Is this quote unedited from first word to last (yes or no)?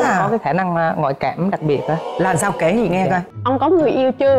no